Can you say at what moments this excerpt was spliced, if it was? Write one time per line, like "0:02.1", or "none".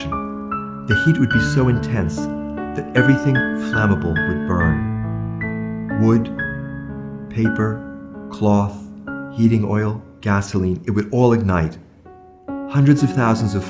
0:02.2

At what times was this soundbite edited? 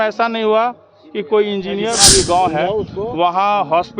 0:02.0

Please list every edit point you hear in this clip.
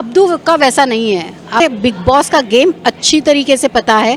0:01.6

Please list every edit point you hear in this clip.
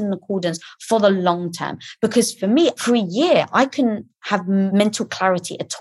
0:02.8
0:04.7

